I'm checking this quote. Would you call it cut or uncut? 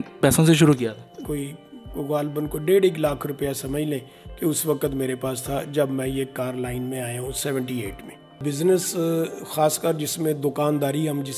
cut